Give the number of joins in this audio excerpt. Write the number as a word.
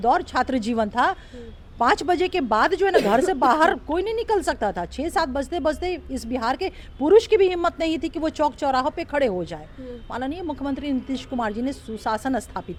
zero